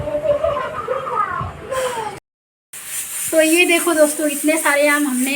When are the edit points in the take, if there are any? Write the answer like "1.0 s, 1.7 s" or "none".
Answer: 2.1 s